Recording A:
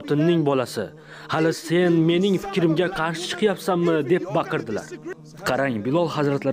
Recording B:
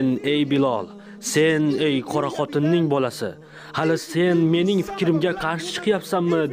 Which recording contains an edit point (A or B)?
A